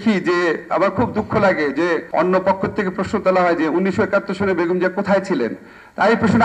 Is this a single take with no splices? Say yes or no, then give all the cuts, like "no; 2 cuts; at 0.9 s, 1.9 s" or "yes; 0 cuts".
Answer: no; 1 cut; at 2.1 s